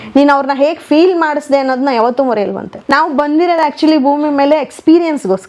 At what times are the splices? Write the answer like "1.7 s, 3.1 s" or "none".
2.8 s